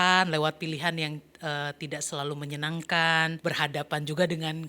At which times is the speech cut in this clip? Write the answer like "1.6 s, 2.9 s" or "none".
3.4 s